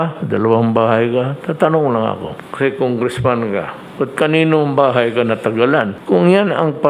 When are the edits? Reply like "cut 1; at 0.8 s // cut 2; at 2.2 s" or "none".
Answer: cut 1; at 2.4 s // cut 2; at 3.8 s // cut 3; at 6.0 s

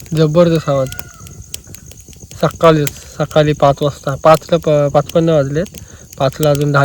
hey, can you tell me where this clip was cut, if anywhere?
none

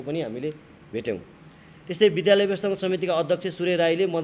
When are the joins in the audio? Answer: none

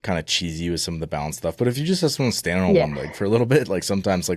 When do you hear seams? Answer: none

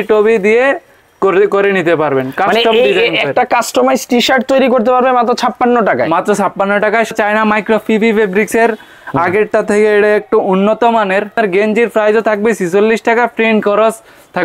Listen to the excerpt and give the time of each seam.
cut 1; at 7.1 s // cut 2; at 11.3 s

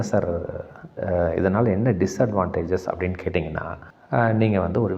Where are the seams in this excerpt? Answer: cut 1; at 3.9 s

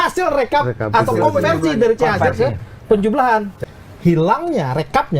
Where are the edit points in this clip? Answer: cut 1; at 3.5 s

